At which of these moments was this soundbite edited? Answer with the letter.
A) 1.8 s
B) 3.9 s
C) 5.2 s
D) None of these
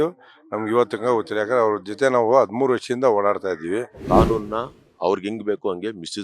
B